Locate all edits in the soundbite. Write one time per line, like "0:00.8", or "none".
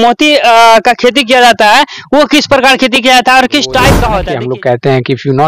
0:04.2